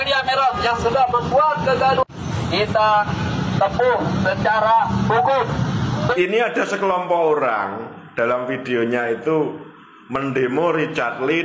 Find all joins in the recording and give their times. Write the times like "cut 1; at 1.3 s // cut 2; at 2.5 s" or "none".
cut 1; at 6.1 s